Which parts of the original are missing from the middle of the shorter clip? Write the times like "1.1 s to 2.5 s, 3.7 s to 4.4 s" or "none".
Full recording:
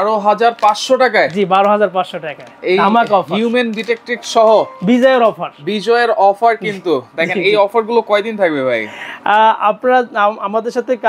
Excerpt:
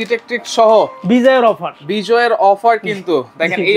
none